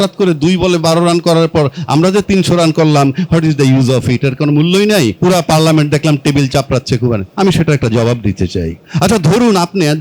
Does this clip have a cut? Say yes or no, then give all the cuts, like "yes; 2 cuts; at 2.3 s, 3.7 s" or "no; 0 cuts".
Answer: yes; 3 cuts; at 5.1 s, 7.3 s, 8.8 s